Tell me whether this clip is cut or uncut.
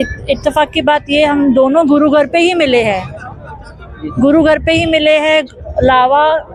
uncut